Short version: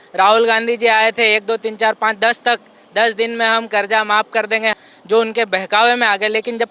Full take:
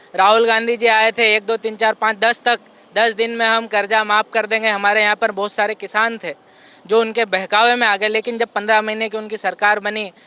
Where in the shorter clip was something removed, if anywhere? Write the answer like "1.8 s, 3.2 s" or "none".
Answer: 4.8 s